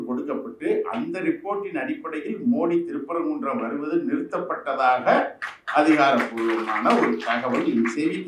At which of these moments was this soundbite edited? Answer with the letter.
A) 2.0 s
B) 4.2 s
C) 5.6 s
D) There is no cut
D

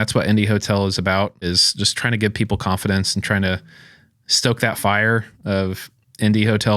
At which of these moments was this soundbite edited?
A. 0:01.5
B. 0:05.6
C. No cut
A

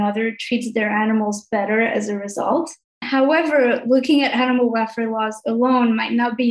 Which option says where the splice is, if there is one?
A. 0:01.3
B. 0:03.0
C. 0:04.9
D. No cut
B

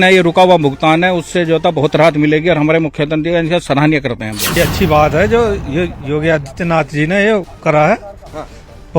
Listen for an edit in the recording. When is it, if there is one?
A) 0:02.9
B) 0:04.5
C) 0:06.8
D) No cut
B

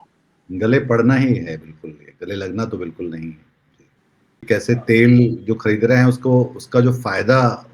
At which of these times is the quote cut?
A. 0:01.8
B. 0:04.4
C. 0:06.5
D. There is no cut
B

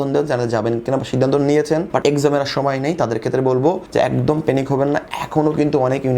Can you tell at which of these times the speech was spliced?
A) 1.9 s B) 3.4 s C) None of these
A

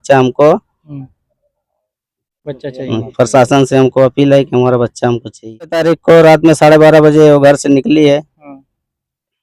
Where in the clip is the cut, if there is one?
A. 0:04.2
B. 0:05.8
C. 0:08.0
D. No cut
B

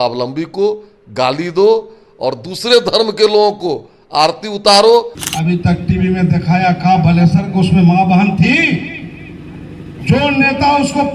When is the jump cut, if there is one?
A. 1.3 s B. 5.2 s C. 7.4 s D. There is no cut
B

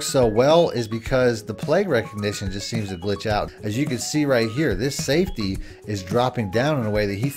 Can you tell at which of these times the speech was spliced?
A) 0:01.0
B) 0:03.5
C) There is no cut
B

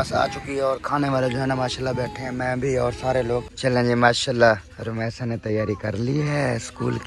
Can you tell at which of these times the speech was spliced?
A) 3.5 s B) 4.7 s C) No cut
A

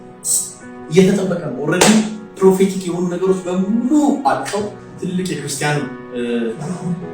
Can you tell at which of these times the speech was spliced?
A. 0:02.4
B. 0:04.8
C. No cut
B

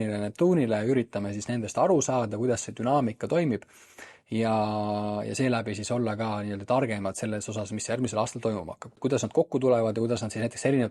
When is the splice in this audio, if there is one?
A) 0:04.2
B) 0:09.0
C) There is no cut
B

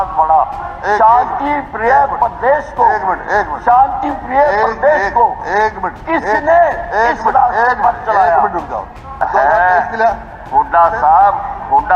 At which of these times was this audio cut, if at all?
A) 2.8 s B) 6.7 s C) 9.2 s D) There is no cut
C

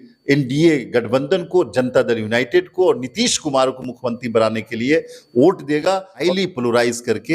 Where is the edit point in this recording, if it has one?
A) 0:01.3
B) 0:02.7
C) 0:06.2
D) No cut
C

